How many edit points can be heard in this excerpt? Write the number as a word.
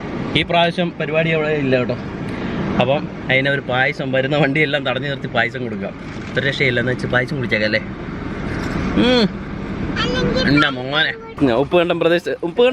one